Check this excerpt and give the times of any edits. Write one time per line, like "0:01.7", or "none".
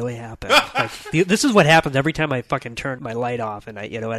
0:03.0